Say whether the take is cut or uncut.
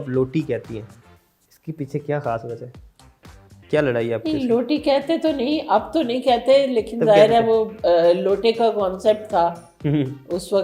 uncut